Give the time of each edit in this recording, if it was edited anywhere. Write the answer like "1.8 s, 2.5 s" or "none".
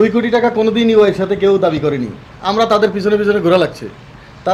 none